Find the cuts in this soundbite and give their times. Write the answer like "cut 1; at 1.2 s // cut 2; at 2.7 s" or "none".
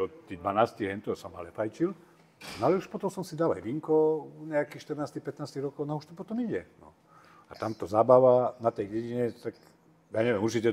none